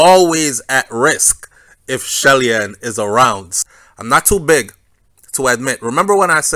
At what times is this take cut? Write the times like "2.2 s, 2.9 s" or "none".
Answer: 3.5 s

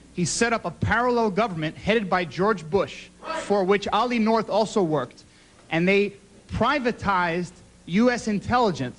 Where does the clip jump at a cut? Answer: 2.2 s

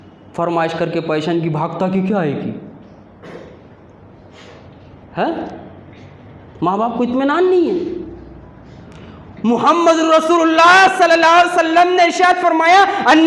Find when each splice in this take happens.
none

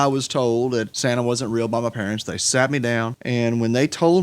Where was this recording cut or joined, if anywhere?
0.9 s, 3.2 s

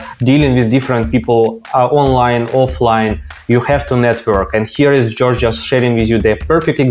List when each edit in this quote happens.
none

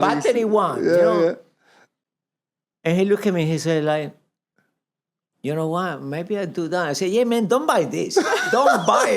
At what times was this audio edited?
none

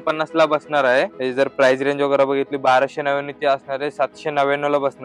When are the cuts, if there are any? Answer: 1.1 s

